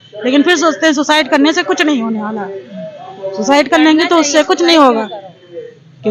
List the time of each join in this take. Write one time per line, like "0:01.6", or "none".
none